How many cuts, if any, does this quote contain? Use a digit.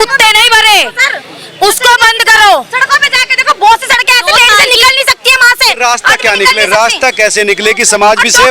0